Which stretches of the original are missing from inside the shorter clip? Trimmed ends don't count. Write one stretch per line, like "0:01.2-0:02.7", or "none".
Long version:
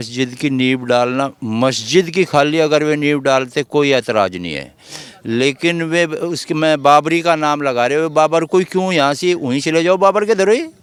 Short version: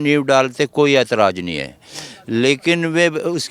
none